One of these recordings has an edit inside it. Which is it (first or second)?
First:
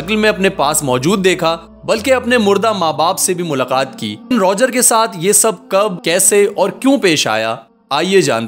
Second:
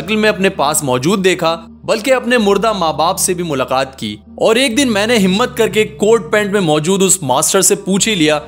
second